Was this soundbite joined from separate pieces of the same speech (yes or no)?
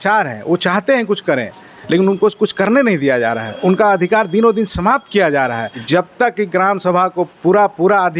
yes